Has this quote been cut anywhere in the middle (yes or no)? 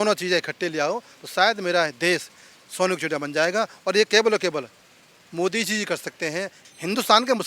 yes